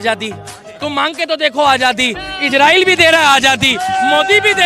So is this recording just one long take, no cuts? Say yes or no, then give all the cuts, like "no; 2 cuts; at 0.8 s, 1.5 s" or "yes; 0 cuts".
yes; 0 cuts